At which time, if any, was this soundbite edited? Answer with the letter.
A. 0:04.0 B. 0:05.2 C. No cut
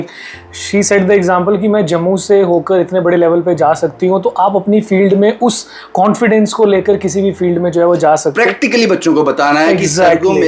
C